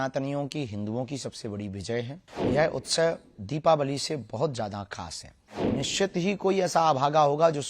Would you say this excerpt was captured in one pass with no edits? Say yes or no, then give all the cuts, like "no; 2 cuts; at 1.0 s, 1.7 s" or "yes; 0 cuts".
no; 2 cuts; at 2.2 s, 5.6 s